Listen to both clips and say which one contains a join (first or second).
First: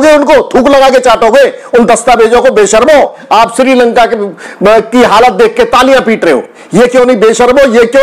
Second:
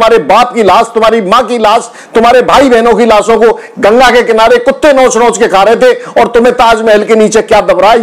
first